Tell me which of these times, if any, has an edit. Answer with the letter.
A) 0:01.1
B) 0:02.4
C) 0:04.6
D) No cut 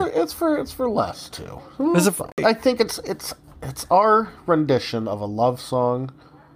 B